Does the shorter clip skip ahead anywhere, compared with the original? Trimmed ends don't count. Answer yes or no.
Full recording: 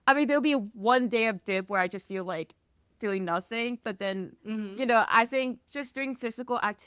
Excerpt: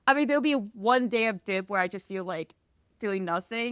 no